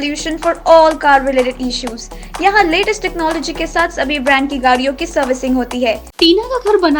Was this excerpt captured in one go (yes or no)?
no